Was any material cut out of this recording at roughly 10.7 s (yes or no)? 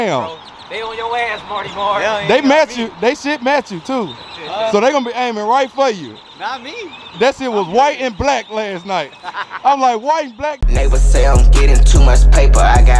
yes